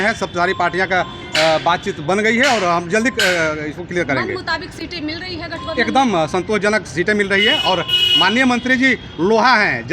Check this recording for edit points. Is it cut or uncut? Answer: uncut